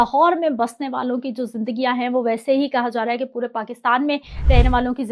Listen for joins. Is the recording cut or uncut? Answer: uncut